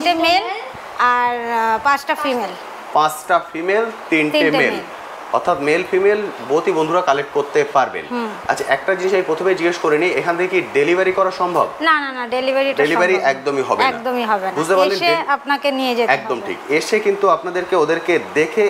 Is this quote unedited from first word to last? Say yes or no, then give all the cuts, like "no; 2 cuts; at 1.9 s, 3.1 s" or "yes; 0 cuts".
yes; 0 cuts